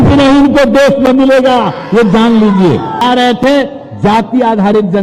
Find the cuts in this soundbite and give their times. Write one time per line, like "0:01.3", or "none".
0:03.0